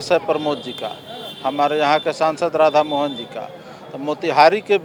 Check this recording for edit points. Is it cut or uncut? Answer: uncut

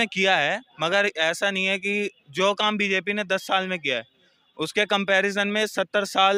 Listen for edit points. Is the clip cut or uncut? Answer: uncut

